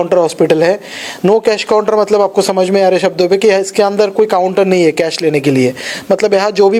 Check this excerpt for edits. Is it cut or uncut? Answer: uncut